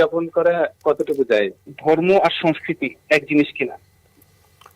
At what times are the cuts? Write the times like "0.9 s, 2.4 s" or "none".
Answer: 1.6 s

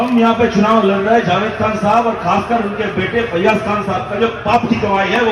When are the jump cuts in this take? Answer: none

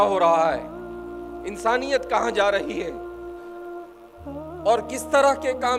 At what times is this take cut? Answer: none

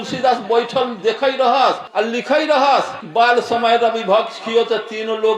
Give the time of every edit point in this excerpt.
1.8 s, 3.0 s

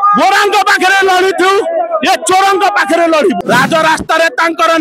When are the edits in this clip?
3.4 s

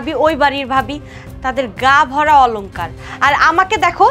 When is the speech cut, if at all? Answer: none

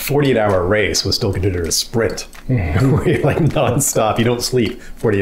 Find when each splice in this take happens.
none

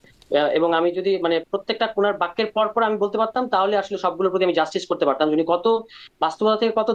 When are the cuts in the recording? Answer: none

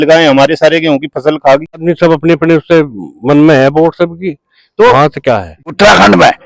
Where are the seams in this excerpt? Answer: 1.8 s, 5.6 s

